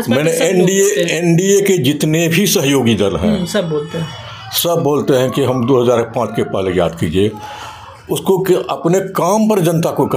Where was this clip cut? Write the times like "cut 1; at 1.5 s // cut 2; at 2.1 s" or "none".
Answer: none